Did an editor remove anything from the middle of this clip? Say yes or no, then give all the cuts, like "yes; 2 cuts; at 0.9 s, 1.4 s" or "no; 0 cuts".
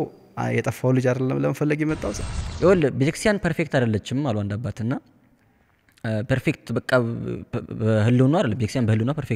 yes; 1 cut; at 2.1 s